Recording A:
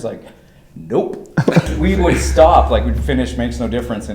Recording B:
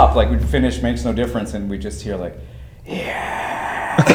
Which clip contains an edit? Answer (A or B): A